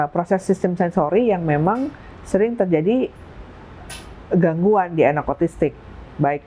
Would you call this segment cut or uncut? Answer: uncut